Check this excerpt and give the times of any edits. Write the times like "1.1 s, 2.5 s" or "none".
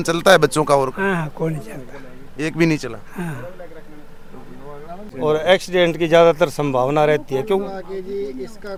none